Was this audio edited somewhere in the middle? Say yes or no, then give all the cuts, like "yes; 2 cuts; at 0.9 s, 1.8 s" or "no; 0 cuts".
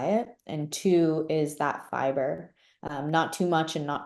no; 0 cuts